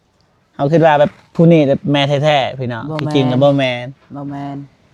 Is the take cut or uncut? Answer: uncut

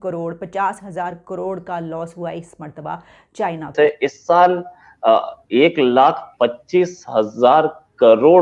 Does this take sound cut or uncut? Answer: cut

